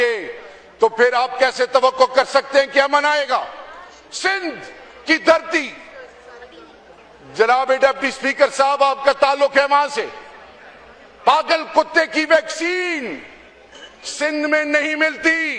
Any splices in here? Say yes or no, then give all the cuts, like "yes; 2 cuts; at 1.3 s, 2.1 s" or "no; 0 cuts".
no; 0 cuts